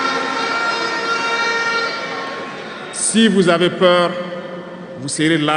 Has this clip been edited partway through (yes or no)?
no